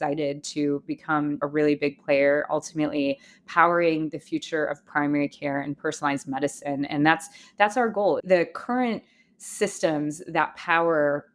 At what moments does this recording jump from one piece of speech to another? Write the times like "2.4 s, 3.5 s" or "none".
1.4 s, 8.2 s